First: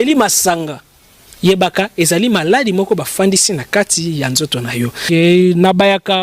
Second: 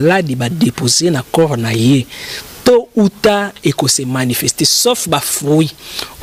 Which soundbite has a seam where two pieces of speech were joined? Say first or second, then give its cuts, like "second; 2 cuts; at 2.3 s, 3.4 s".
first; 1 cut; at 5.1 s